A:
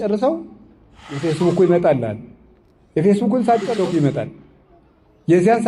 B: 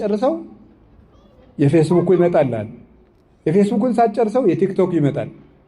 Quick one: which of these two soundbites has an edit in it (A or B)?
A